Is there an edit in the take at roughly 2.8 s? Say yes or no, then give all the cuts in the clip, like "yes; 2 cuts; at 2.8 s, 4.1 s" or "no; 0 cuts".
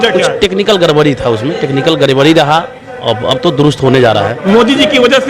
no; 1 cut; at 4.4 s